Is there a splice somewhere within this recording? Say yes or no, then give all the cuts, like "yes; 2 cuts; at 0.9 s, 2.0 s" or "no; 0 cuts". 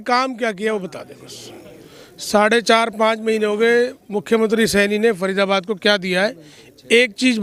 no; 0 cuts